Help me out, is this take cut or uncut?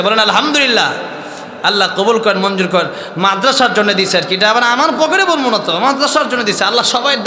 uncut